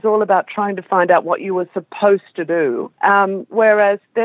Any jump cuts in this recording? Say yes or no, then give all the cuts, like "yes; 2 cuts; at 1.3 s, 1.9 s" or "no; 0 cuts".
yes; 1 cut; at 2.9 s